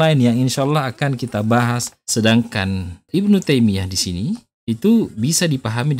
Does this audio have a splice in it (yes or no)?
yes